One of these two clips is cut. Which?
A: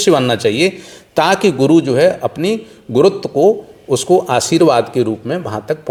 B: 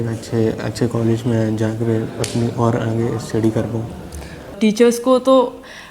B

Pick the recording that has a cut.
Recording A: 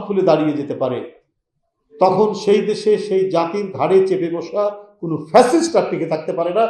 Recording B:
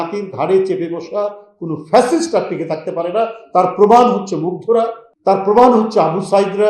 B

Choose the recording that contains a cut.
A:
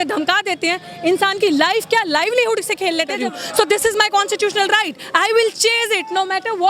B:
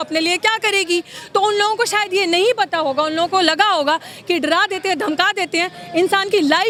A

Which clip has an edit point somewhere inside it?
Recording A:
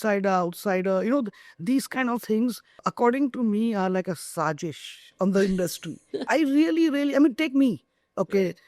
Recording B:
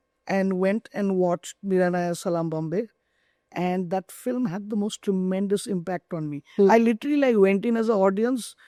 A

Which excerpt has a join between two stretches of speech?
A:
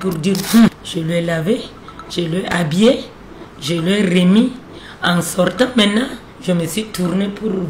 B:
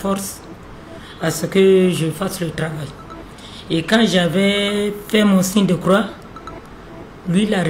A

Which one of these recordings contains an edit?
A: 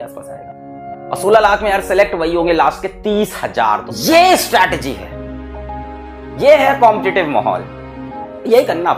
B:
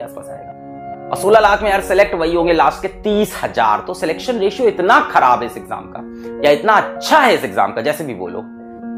A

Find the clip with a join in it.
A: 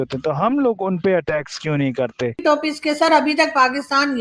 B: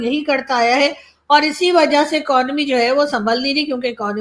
A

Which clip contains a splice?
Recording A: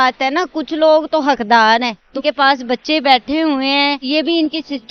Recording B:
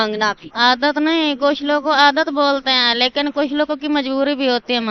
A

